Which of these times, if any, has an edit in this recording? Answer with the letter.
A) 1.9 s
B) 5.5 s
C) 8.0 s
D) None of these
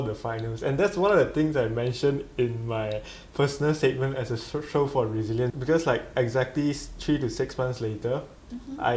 B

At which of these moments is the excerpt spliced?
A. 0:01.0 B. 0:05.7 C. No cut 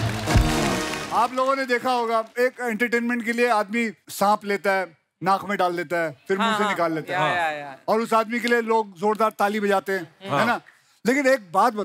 A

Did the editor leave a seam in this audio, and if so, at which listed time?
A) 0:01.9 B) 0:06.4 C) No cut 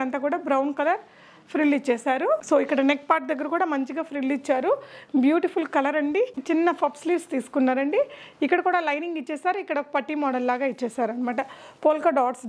B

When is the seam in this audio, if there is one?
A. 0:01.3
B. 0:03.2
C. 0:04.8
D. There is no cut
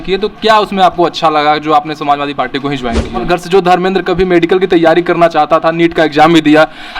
B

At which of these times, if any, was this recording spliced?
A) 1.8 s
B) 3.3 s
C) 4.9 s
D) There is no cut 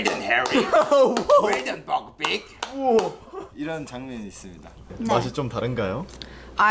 C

